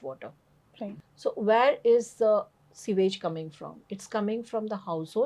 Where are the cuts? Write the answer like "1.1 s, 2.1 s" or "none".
1.1 s